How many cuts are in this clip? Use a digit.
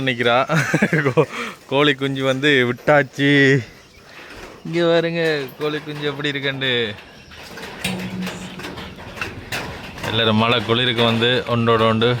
0